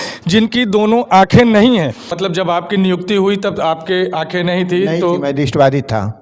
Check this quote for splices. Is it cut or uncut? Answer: cut